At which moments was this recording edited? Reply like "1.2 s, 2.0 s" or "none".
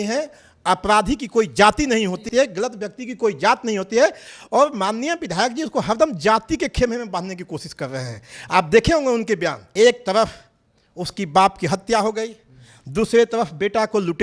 2.3 s, 9.6 s